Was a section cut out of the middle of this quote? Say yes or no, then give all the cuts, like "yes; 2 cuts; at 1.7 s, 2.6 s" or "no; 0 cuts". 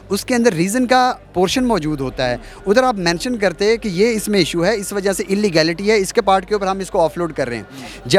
no; 0 cuts